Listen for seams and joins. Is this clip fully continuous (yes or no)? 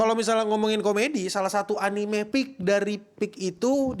yes